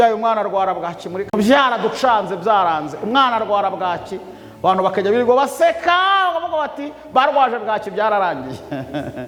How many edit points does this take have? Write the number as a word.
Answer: zero